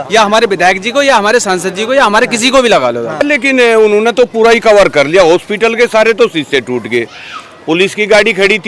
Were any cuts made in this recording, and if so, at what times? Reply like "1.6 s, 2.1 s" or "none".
3.2 s